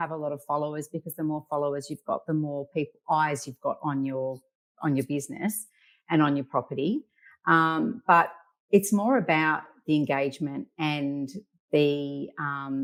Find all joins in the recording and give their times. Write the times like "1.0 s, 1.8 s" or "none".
none